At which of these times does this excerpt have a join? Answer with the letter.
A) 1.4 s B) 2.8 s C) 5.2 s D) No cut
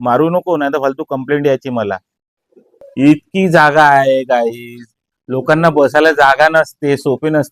B